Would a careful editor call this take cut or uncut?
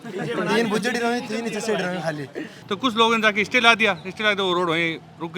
cut